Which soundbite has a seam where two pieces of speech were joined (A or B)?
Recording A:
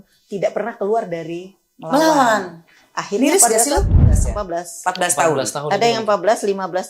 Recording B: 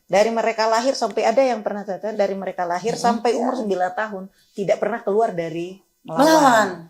A